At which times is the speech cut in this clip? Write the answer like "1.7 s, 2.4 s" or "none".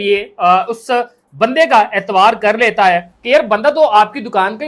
3.1 s